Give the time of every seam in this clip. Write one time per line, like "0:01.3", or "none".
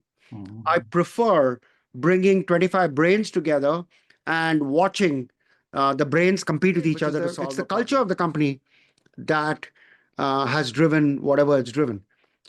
0:07.5